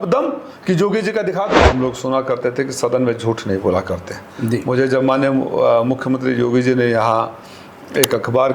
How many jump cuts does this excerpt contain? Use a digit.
1